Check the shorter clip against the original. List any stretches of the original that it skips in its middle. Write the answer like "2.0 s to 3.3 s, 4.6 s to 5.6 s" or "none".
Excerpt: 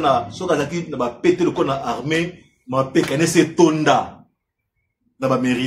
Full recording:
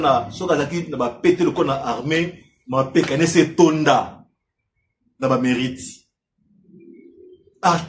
none